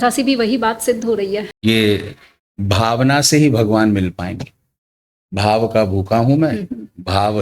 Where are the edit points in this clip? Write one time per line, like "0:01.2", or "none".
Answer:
0:01.5